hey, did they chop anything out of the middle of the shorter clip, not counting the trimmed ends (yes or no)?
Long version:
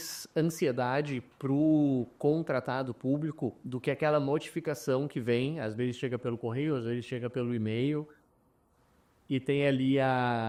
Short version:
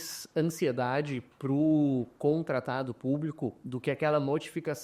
no